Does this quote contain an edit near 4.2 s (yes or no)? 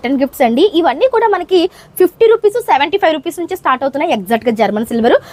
no